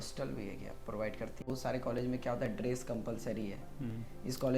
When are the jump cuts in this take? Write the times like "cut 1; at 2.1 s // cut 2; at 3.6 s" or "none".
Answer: cut 1; at 1.4 s